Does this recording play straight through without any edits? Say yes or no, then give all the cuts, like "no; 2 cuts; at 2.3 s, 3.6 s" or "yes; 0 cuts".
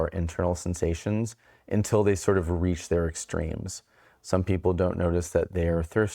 no; 1 cut; at 4.0 s